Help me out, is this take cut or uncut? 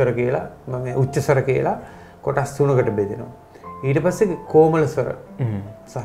uncut